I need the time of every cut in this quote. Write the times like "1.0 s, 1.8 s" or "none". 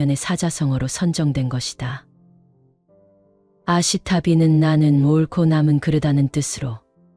none